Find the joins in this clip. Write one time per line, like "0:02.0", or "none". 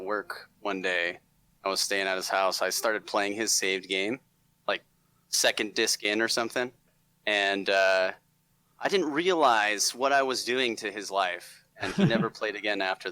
0:06.8